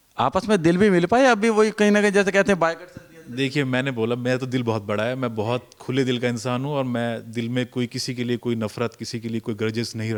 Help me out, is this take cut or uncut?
uncut